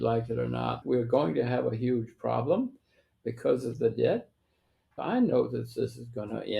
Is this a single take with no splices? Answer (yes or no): no